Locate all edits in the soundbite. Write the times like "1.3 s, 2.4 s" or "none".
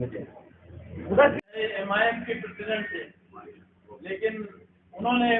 1.6 s